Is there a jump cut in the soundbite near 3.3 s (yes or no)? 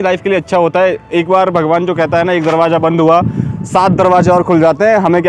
no